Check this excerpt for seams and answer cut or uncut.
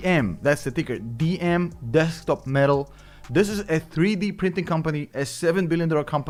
uncut